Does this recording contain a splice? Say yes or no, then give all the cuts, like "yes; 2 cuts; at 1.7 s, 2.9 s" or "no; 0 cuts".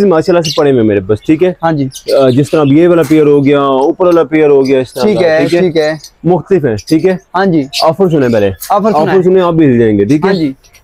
no; 0 cuts